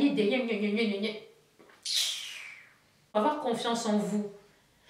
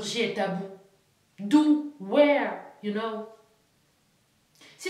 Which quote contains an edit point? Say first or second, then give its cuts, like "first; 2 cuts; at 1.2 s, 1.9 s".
first; 1 cut; at 3.1 s